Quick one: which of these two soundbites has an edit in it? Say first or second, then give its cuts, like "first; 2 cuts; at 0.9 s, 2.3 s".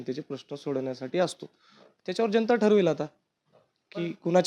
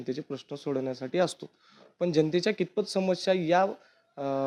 first; 1 cut; at 1.8 s